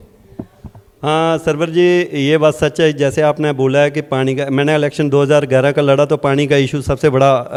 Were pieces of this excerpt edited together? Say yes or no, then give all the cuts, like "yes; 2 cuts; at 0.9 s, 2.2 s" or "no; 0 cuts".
no; 0 cuts